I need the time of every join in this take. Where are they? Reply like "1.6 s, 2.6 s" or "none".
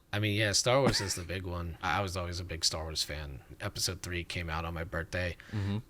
1.9 s, 3.5 s

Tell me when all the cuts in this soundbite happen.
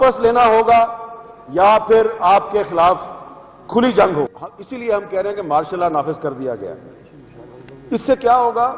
4.4 s

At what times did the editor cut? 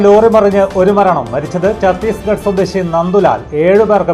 none

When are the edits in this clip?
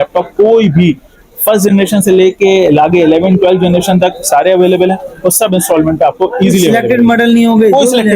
none

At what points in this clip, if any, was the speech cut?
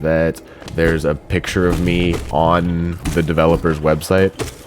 2.2 s, 3.0 s

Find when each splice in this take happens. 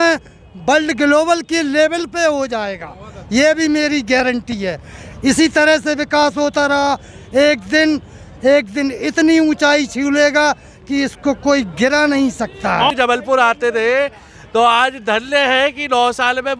12.9 s

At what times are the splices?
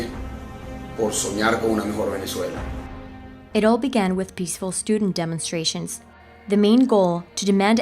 1.2 s

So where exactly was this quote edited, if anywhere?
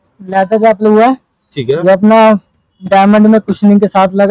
none

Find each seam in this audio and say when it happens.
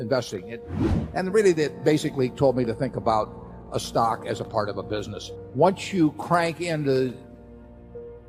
5.2 s

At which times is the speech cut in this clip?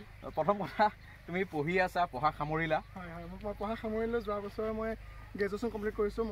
none

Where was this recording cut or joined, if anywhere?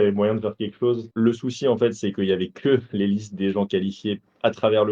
1.1 s

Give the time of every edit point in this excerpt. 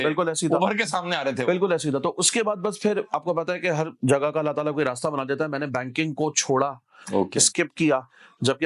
none

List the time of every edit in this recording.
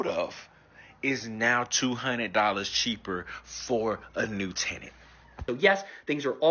5.4 s

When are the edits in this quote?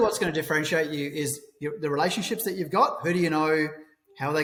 none

